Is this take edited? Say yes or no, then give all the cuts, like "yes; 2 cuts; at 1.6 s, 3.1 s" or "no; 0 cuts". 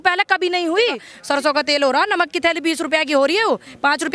yes; 1 cut; at 1.1 s